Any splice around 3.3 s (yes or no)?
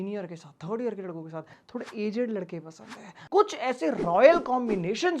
yes